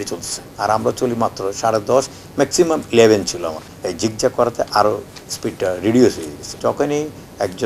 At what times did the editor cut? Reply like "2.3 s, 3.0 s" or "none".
3.7 s, 6.6 s